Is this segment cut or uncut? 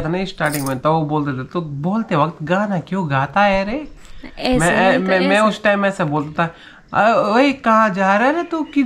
uncut